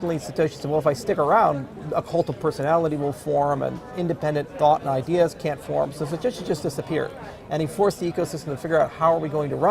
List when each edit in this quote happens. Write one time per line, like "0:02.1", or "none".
none